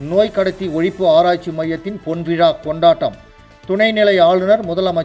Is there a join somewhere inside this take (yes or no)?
no